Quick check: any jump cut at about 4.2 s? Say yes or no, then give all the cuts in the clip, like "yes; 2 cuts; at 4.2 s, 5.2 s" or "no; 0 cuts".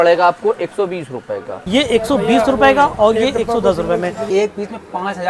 yes; 2 cuts; at 1.6 s, 4.2 s